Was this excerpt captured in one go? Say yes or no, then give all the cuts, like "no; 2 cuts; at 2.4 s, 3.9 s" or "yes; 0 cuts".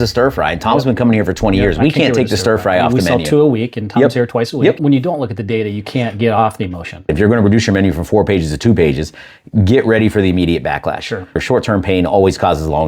no; 3 cuts; at 4.8 s, 7.1 s, 11.4 s